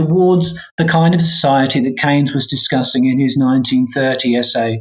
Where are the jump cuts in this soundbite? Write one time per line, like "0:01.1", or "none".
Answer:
none